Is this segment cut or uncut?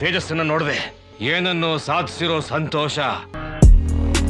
cut